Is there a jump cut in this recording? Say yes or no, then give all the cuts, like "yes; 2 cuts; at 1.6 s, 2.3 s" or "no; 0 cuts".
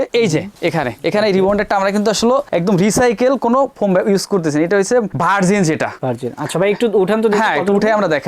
no; 0 cuts